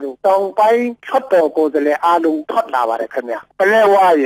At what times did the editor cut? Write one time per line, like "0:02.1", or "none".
0:03.4